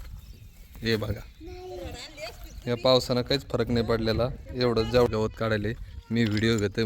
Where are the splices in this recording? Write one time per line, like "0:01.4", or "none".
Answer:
0:05.1